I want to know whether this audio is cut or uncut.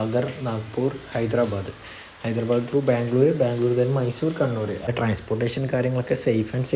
cut